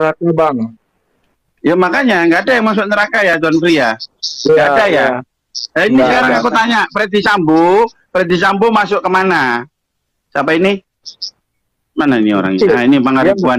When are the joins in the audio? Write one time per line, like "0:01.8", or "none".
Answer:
none